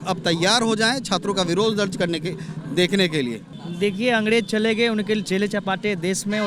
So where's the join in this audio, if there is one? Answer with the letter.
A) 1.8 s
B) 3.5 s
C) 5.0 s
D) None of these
B